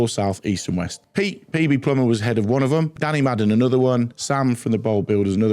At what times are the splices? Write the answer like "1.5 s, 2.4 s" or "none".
1.0 s, 3.0 s, 4.2 s